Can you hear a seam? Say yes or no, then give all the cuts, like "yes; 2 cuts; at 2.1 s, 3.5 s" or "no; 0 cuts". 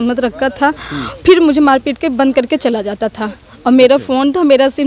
no; 0 cuts